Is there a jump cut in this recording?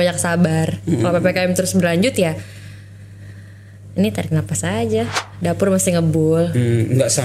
yes; 1 cut; at 5.2 s

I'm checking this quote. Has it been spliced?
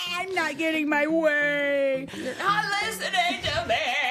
no; 0 cuts

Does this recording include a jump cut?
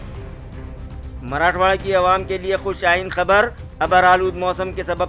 yes; 1 cut; at 1.1 s

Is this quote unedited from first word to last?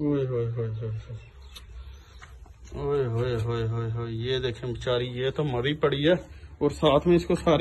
yes; 0 cuts

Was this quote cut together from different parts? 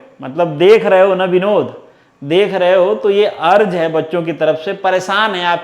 no; 0 cuts

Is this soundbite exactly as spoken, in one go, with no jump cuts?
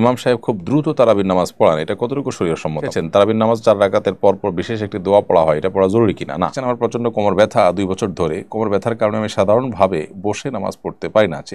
no; 2 cuts; at 2.9 s, 6.6 s

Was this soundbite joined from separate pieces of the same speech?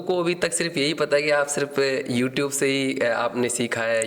no; 0 cuts

